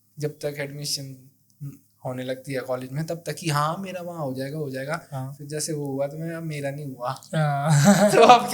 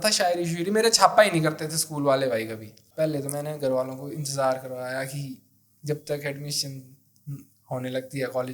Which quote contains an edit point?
second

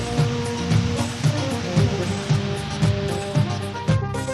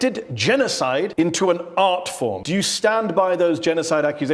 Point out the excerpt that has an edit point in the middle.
second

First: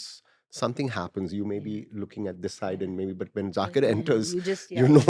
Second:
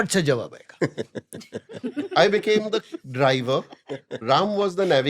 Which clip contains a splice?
second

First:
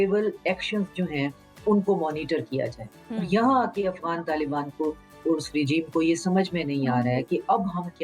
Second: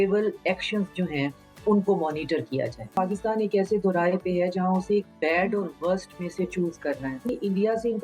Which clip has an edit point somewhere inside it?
second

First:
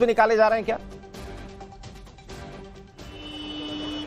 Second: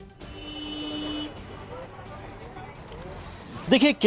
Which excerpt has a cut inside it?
first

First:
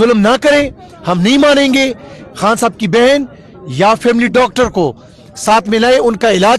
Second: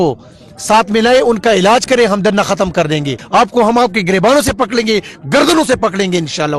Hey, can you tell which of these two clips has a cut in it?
second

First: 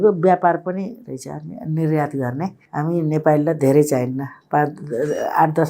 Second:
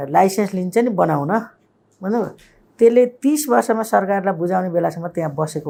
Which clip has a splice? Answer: first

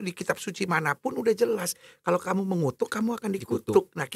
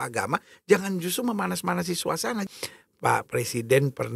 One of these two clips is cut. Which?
second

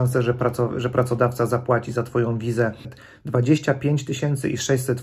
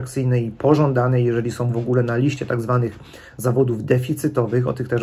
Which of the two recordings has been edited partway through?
first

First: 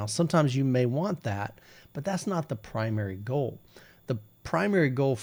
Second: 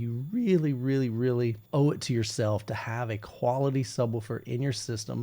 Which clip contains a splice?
second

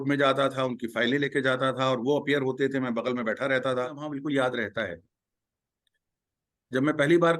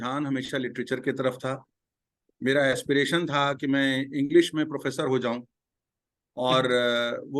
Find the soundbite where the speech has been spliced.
first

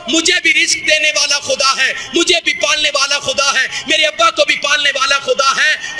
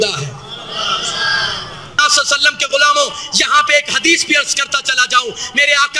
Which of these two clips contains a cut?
second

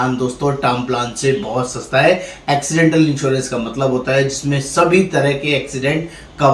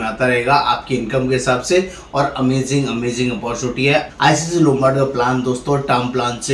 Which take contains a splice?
second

